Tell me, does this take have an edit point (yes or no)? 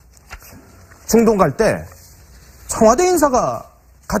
no